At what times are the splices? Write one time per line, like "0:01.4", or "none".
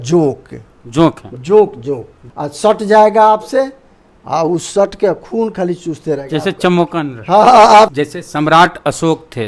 0:02.2
0:07.9